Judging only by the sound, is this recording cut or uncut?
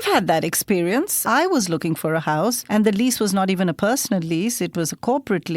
cut